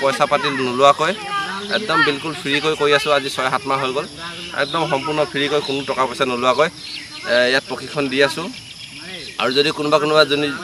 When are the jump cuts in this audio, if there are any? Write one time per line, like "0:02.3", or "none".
none